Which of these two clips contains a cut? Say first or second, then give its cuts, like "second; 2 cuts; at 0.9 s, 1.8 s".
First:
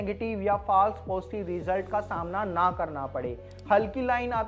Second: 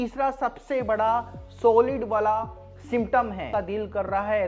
second; 1 cut; at 3.5 s